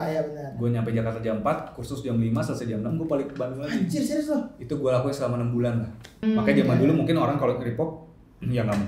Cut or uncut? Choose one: cut